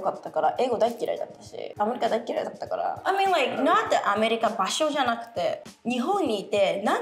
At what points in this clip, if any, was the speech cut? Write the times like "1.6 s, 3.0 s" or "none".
1.7 s, 3.0 s